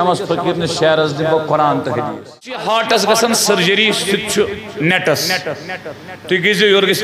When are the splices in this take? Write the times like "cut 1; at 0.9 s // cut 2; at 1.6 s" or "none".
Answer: cut 1; at 2.5 s